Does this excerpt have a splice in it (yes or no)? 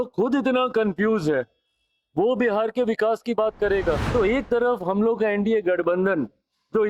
yes